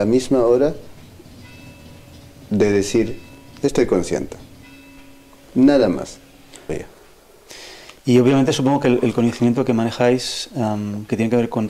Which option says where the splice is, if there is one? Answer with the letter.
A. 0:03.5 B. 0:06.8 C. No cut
B